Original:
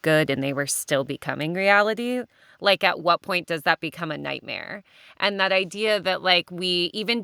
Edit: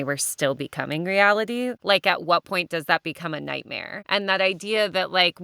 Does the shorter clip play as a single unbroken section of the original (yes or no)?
no